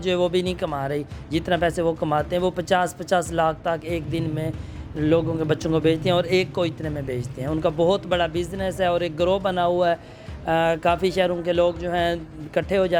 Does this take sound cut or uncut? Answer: uncut